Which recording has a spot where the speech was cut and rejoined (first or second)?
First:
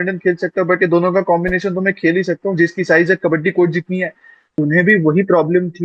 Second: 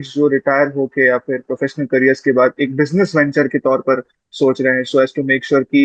first